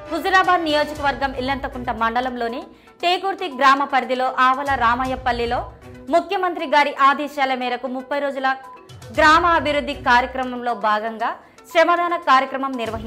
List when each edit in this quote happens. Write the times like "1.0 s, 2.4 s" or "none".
none